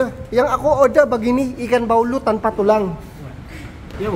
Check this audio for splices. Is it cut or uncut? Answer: uncut